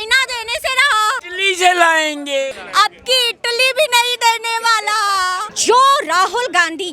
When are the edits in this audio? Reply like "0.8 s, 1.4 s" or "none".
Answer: 1.3 s, 2.5 s, 5.5 s